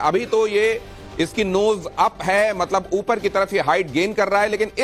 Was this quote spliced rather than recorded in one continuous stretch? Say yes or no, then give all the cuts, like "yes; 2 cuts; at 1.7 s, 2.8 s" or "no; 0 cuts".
no; 0 cuts